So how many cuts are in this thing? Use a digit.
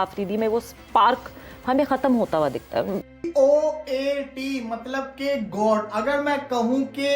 1